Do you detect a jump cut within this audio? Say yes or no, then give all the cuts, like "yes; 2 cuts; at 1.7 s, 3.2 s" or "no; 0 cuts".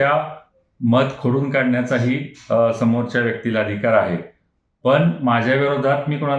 no; 0 cuts